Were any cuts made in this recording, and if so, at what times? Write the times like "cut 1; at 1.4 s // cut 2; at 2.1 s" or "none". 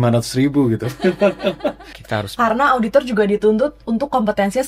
cut 1; at 1.9 s